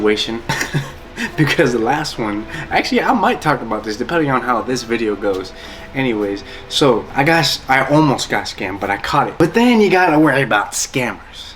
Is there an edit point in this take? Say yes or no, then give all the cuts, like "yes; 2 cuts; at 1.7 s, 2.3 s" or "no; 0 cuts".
yes; 1 cut; at 9.3 s